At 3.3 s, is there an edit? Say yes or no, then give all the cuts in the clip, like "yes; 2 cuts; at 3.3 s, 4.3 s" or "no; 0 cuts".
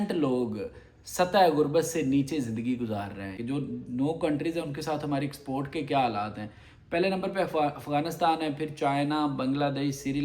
yes; 1 cut; at 3.3 s